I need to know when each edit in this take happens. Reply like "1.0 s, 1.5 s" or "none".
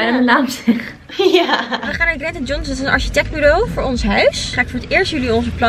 1.9 s, 4.5 s